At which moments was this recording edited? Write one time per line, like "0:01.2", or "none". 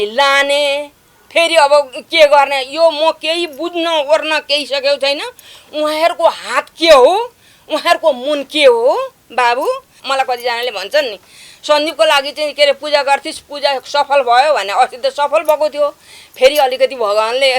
0:10.0